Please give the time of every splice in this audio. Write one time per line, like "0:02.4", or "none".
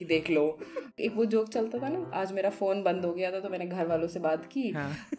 0:01.0
0:02.1